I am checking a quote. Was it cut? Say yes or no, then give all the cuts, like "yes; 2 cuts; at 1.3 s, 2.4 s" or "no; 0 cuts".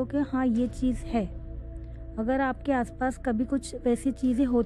no; 0 cuts